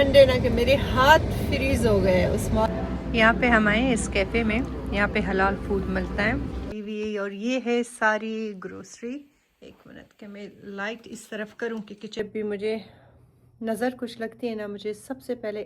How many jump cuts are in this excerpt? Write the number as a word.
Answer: three